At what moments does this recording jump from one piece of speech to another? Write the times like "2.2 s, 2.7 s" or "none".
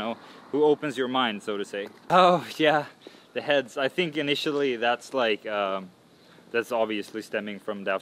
2.0 s